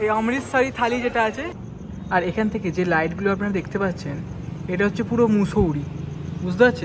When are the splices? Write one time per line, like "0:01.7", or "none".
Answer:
0:01.6

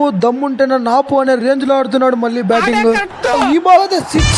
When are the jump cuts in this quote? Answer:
0:03.4

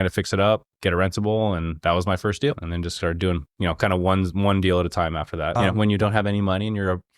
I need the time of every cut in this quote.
0:02.7
0:05.6

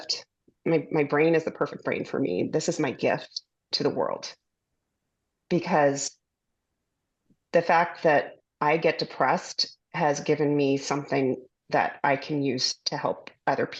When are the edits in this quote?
none

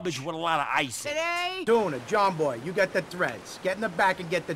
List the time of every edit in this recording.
0:01.6

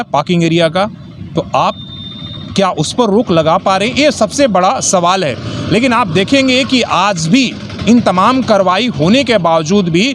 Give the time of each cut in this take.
none

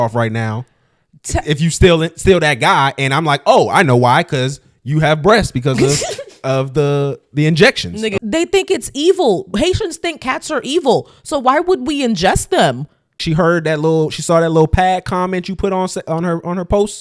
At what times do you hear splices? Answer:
0:08.1
0:13.1

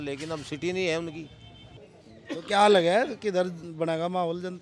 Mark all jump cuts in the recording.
0:01.7

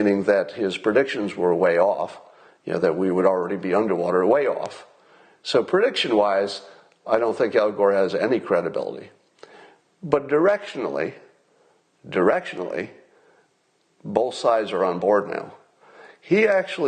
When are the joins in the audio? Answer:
none

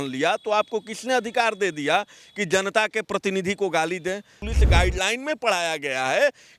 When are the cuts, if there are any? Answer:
0:04.4

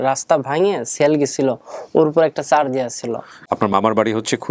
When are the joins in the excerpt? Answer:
0:03.3

